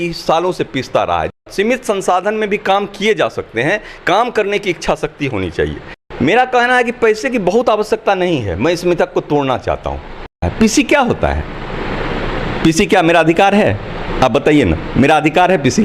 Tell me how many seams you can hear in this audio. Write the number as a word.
three